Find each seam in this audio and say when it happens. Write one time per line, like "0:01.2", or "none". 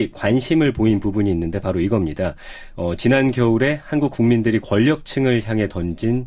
0:05.0